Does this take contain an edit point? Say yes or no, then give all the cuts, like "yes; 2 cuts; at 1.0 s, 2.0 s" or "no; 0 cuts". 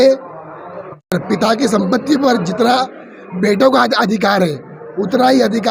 yes; 1 cut; at 1.0 s